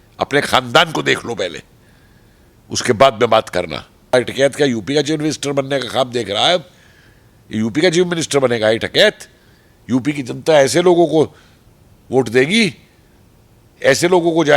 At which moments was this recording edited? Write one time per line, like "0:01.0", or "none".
0:04.1